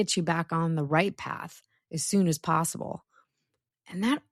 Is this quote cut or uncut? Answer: uncut